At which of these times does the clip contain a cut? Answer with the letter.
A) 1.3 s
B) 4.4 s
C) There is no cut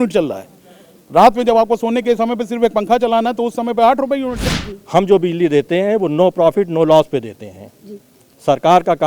B